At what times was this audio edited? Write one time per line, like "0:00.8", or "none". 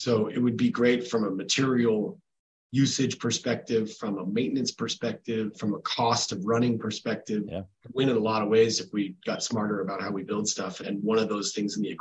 0:07.5
0:10.8